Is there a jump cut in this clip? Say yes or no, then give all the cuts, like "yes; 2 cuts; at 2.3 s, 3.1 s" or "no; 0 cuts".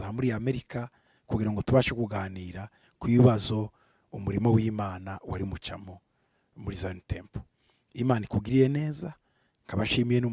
no; 0 cuts